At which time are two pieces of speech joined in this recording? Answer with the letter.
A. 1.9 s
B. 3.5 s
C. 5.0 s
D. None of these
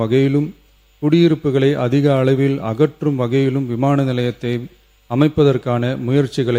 D